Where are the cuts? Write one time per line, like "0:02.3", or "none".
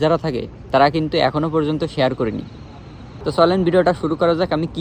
none